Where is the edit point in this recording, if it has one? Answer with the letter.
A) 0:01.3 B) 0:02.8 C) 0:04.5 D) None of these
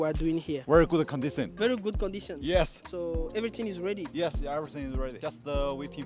B